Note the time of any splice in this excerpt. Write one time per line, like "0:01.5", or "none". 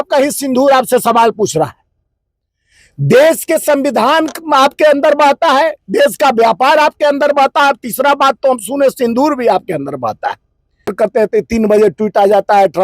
0:10.9